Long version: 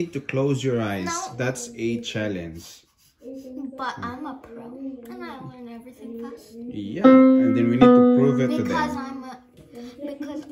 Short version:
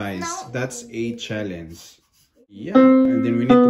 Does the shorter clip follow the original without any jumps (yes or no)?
no